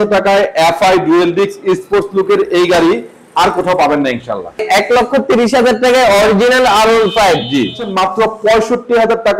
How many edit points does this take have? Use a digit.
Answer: 2